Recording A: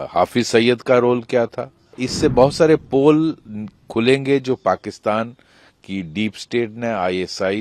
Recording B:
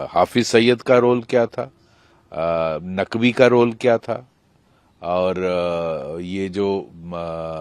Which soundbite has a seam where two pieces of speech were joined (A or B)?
A